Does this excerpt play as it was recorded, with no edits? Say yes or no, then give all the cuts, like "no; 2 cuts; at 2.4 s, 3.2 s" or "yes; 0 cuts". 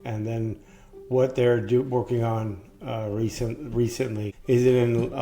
no; 1 cut; at 4.3 s